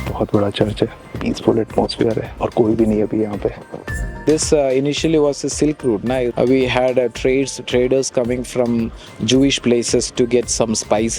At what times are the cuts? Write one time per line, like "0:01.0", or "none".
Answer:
0:01.1
0:04.2
0:06.3